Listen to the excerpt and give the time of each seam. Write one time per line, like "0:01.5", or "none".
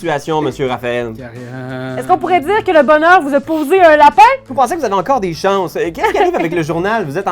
0:04.5

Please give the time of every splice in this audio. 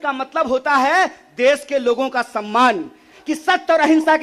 0:03.1

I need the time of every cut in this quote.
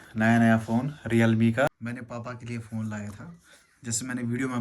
0:01.7

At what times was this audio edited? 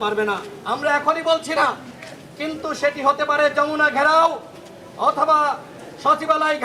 none

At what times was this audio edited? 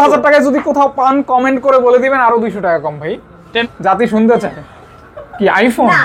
0:03.6

